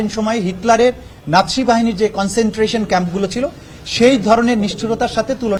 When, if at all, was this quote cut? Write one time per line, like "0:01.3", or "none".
none